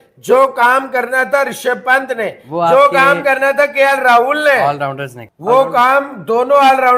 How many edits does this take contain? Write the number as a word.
zero